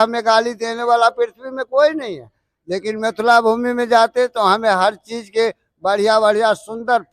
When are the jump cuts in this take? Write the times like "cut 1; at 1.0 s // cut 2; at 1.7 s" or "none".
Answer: none